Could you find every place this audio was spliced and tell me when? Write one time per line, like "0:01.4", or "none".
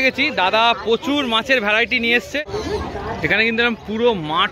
0:02.3